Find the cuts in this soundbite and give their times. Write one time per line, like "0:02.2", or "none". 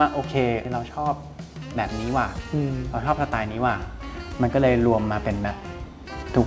none